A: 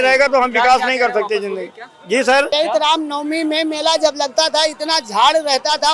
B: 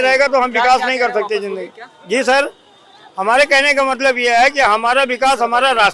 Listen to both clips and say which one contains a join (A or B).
A